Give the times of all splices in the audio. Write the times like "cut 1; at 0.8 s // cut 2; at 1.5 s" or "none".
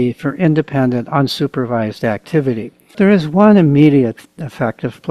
cut 1; at 3.0 s